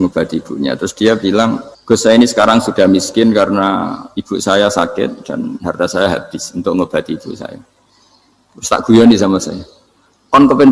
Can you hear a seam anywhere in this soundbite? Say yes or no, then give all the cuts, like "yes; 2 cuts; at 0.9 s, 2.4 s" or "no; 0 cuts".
yes; 1 cut; at 1.7 s